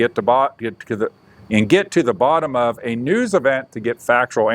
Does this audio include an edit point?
no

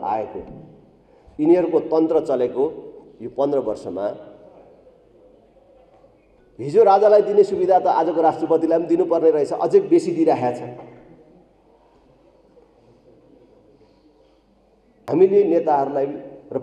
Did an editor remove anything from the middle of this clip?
yes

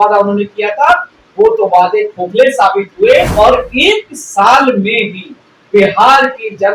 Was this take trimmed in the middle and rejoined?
yes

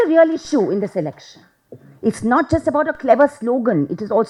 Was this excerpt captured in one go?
yes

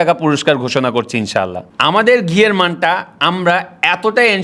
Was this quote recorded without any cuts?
yes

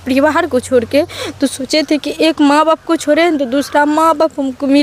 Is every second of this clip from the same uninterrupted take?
yes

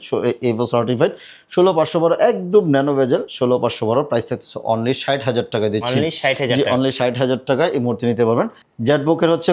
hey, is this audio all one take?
yes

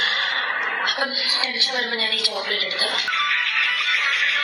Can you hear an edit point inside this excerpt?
yes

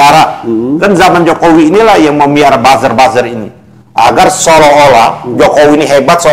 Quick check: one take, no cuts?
yes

